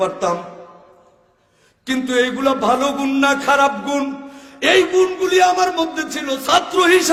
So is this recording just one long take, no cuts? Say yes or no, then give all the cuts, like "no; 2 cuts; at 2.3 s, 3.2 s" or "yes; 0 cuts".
yes; 0 cuts